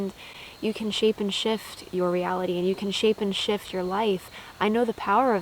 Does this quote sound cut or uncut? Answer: cut